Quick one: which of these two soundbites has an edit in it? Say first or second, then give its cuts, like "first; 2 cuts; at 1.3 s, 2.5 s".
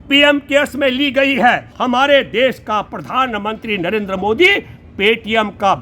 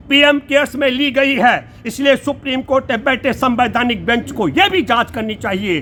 first; 1 cut; at 1.8 s